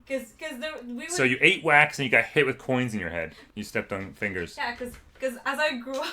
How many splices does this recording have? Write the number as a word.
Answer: one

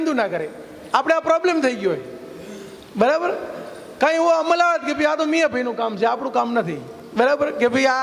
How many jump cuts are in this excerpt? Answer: zero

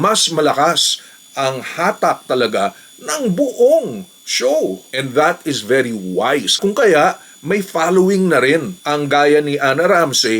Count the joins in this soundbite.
two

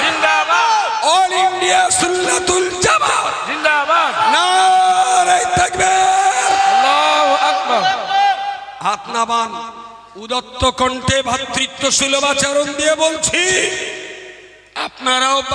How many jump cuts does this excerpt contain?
zero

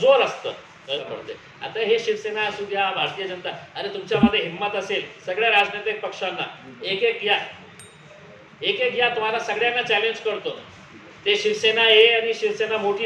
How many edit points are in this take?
one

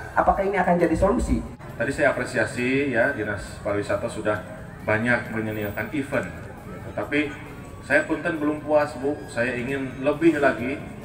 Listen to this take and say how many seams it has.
one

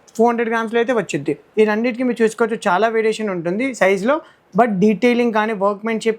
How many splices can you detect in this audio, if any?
one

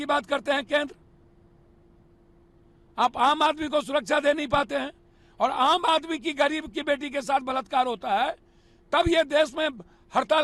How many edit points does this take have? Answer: zero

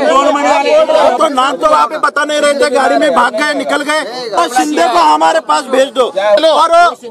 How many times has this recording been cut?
two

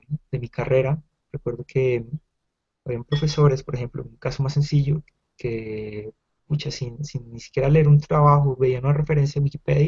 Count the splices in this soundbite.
one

